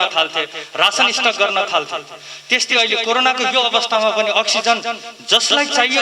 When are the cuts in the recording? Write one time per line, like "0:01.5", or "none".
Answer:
none